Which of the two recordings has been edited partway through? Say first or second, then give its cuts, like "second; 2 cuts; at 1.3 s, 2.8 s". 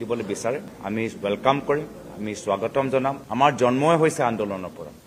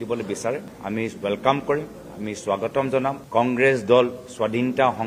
first; 1 cut; at 3.2 s